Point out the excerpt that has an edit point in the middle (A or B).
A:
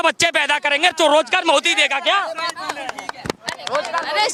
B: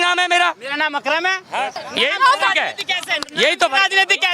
B